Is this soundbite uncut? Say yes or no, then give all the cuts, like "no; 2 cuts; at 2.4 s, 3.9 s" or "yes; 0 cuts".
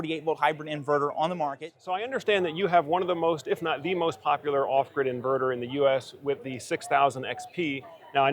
no; 1 cut; at 2.0 s